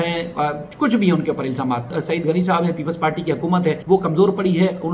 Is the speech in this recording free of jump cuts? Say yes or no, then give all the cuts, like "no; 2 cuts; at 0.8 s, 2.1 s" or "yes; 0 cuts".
no; 2 cuts; at 1.9 s, 3.8 s